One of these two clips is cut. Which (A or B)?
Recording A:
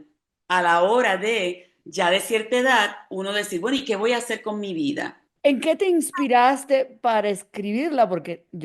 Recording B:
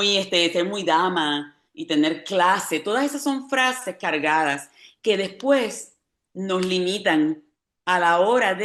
A